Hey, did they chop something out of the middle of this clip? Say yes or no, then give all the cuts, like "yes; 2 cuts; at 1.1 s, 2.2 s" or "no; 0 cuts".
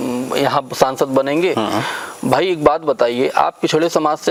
no; 0 cuts